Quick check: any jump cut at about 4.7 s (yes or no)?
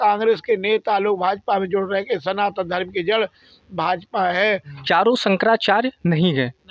yes